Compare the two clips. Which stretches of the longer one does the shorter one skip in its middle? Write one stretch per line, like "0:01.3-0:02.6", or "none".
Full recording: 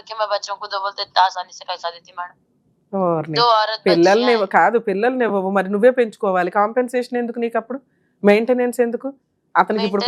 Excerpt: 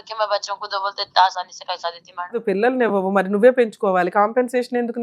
0:02.4-0:04.8

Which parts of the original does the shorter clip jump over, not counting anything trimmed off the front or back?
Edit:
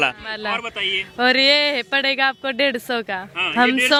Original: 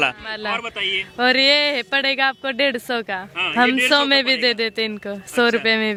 none

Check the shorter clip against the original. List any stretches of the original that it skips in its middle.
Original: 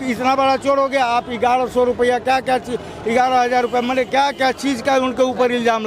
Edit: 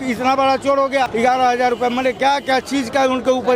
0:01.1-0:03.0

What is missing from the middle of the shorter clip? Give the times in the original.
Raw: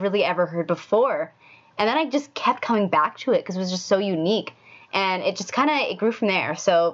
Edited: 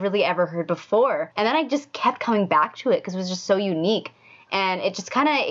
0:01.3-0:01.7

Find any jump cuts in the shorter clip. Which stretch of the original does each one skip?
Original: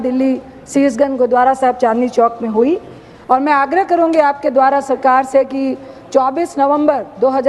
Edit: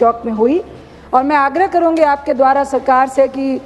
none

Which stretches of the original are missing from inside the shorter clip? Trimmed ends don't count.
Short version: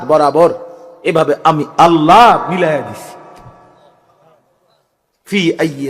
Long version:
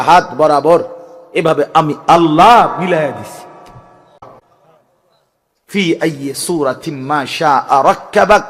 0:04.2-0:04.3

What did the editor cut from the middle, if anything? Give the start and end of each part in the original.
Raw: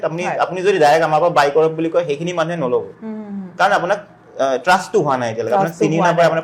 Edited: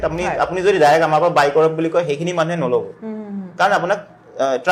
none

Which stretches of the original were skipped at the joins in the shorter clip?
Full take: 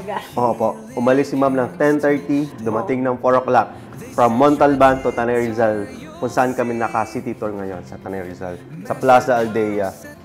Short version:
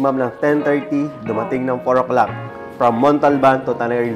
none

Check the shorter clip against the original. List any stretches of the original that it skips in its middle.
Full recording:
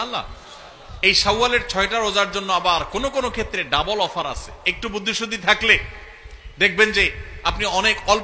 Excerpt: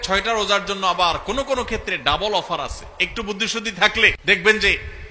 0:05.8-0:06.5

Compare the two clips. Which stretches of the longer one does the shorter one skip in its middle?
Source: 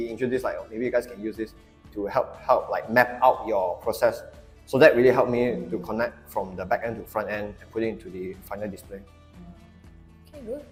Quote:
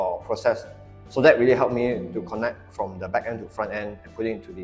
none

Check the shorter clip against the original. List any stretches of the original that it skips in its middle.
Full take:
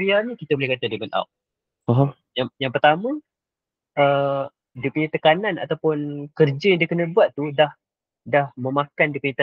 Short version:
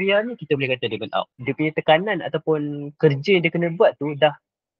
0:01.4-0:04.8

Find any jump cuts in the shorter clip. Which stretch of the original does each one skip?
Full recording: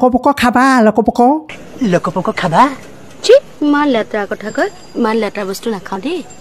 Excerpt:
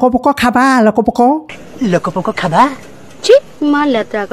none

